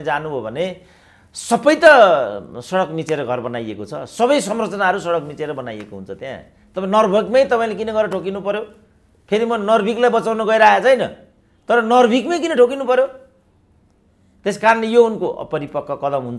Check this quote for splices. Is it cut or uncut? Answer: uncut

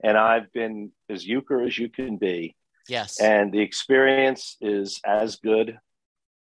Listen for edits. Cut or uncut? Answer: uncut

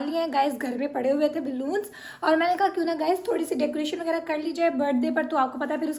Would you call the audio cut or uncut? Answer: uncut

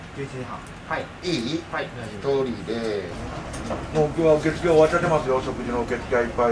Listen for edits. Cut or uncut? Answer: cut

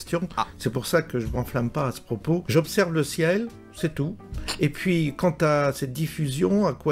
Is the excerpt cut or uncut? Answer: cut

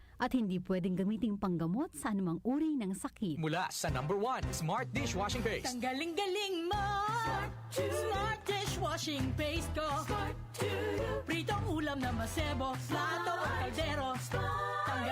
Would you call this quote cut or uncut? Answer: cut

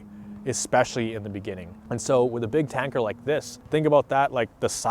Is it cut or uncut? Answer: cut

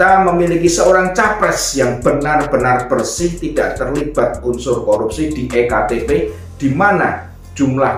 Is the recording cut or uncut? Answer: uncut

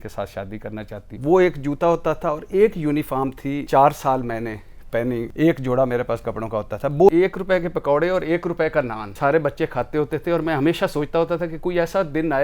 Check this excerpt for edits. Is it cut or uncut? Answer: cut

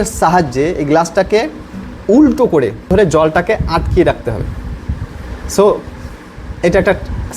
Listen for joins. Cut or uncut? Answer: cut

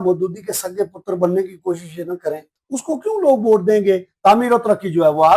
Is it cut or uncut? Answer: cut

